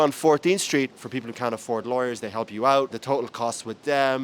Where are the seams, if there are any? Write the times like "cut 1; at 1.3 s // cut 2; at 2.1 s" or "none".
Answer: cut 1; at 1.0 s // cut 2; at 3.0 s